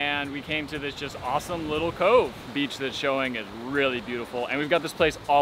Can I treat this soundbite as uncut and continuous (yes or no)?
no